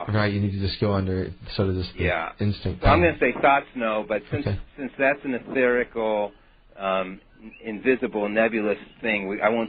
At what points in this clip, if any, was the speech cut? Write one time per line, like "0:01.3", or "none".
0:05.9